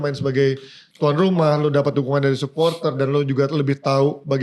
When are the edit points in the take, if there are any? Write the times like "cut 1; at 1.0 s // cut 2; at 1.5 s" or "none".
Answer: none